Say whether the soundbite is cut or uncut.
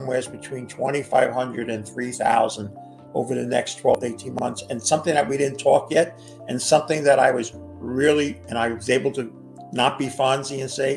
uncut